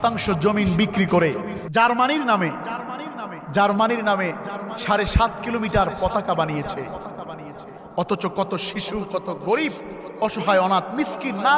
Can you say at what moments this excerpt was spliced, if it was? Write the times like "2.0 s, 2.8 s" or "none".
1.6 s